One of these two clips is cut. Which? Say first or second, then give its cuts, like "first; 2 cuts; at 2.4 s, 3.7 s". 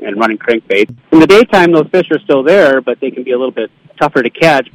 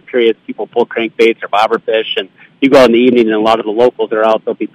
first; 2 cuts; at 1.0 s, 3.8 s